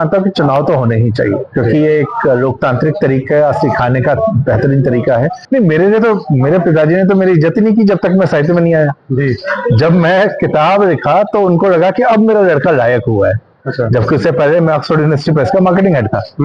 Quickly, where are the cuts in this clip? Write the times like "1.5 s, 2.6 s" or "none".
5.4 s